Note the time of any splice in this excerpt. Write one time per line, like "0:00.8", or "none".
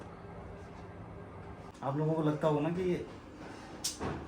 0:01.7